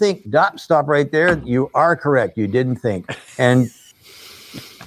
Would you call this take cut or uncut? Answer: uncut